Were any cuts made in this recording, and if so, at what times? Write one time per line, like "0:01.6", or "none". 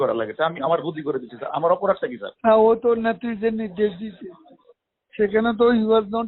0:02.3